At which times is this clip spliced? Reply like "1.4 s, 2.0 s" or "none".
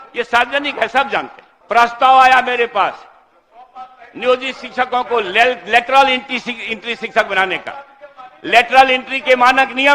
1.9 s